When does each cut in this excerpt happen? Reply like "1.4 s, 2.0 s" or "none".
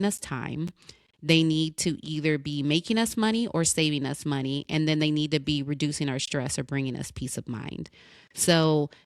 none